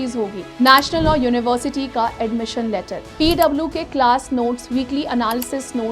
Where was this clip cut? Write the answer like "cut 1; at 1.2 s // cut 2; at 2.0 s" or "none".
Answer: cut 1; at 3.1 s